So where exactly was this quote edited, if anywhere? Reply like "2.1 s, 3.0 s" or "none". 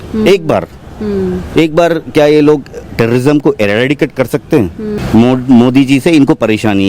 5.0 s